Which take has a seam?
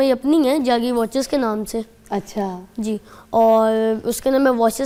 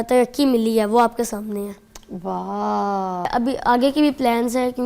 second; 1 cut; at 3.3 s

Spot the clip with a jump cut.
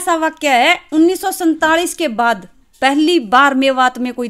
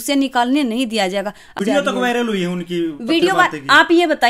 second; 1 cut; at 1.5 s

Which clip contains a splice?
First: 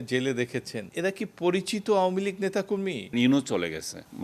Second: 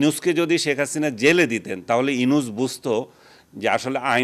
first; 2 cuts; at 0.9 s, 3.1 s

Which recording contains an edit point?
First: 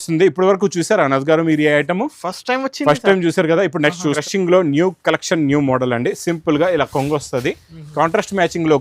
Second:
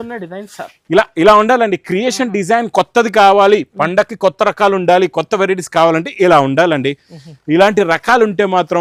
first; 1 cut; at 4.2 s

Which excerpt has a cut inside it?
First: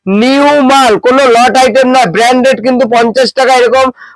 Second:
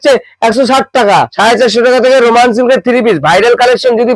second; 1 cut; at 1.3 s

